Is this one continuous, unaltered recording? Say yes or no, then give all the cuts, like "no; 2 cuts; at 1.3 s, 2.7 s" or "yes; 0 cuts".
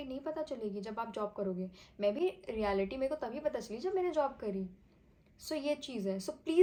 yes; 0 cuts